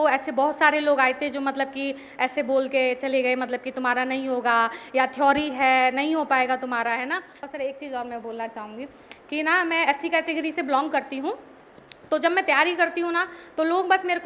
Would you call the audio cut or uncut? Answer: cut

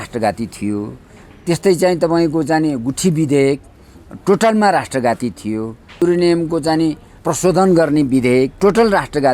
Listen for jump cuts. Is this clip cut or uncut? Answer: cut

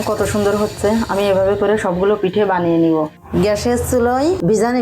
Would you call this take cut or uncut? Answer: cut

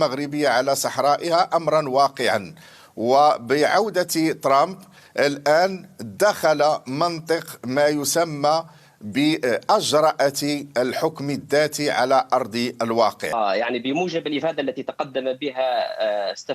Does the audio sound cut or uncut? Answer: cut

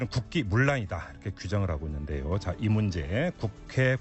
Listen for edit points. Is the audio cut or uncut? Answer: cut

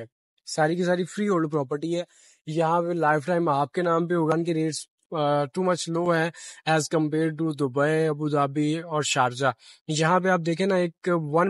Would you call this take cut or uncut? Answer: cut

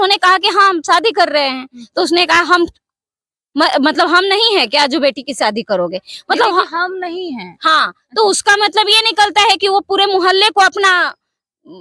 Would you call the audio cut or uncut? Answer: uncut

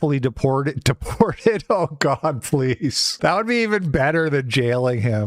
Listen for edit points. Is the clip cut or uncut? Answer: uncut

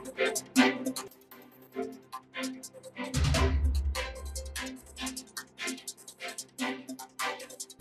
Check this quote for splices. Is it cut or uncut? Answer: uncut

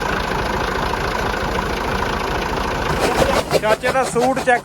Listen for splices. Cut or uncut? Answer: cut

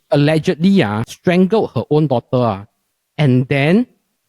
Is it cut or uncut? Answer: cut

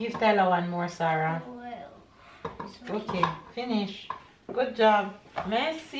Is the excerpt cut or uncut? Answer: uncut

